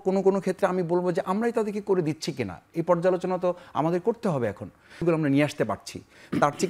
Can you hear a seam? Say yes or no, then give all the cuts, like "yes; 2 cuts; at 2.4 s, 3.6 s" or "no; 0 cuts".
yes; 1 cut; at 5.0 s